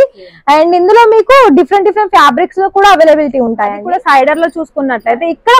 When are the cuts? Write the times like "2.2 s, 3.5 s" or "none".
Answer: 3.8 s